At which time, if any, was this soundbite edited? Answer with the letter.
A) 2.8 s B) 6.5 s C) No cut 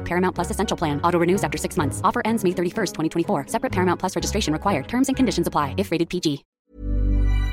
B